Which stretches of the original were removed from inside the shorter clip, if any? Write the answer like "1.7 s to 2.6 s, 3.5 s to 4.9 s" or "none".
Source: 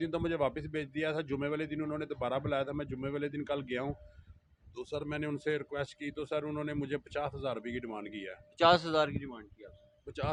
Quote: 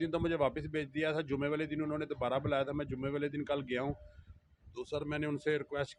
none

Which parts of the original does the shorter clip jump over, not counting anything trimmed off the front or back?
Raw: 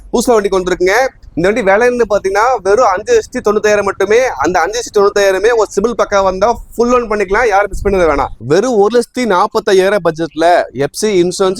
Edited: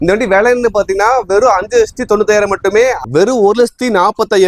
4.4 s to 8.4 s

